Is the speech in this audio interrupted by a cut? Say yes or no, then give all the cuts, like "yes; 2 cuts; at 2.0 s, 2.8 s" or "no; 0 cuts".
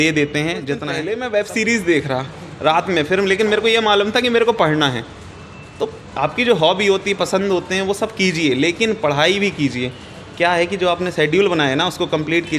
yes; 1 cut; at 0.9 s